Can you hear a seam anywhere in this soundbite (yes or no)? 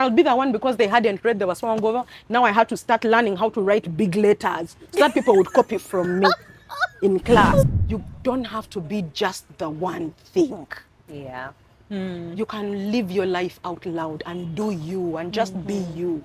yes